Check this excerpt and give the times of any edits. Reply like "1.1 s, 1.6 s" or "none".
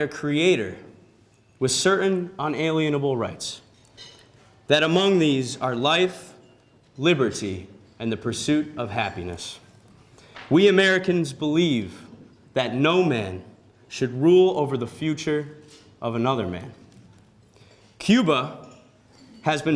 6.3 s